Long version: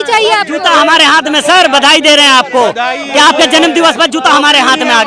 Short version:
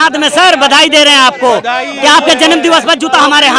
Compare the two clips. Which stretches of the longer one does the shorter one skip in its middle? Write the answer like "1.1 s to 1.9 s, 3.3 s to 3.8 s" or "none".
none